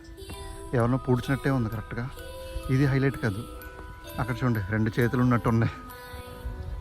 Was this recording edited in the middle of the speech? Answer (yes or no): yes